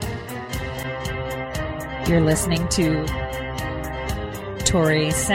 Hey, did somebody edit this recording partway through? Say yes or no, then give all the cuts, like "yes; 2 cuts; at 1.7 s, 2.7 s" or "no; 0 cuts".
no; 0 cuts